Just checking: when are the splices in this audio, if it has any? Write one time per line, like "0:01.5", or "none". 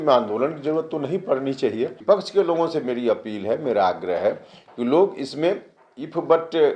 0:01.9